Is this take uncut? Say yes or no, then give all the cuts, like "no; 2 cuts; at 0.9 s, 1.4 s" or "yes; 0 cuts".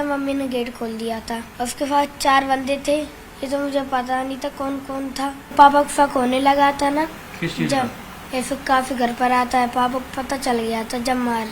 no; 3 cuts; at 1.5 s, 3.2 s, 5.5 s